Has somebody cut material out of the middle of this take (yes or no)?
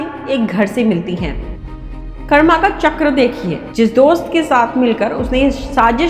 yes